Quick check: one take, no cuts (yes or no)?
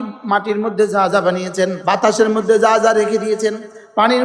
no